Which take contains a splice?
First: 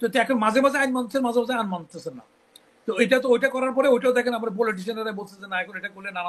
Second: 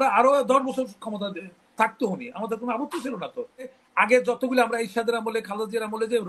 second; 1 cut; at 3.8 s

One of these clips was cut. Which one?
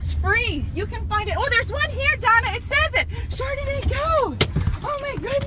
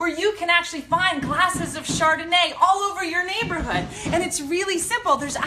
first; 1 cut; at 1.0 s

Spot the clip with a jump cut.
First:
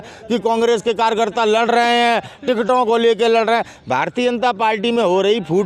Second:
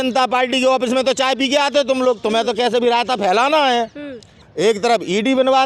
second; 1 cut; at 4.4 s

